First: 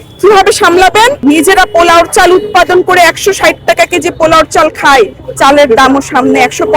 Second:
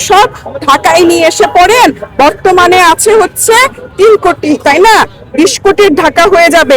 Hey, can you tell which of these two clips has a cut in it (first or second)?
first